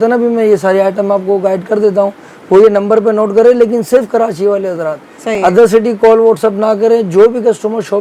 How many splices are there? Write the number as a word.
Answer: zero